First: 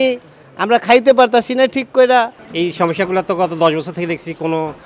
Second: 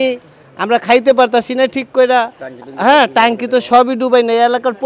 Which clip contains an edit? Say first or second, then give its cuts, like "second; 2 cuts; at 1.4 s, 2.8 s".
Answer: first; 1 cut; at 2.4 s